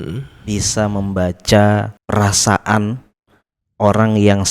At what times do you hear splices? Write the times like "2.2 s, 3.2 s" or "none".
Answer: 2.0 s